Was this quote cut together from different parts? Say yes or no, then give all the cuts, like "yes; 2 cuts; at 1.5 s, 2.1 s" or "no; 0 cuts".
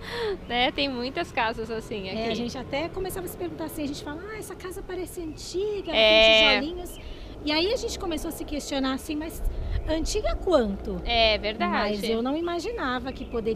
no; 0 cuts